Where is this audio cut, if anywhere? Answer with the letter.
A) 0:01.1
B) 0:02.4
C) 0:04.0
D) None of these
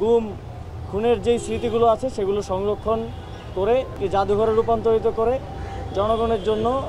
C